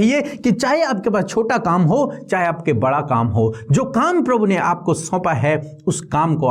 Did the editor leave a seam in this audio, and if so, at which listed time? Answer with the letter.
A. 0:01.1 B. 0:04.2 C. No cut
C